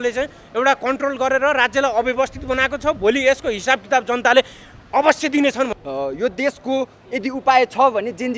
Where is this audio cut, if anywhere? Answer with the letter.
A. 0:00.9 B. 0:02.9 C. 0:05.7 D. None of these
C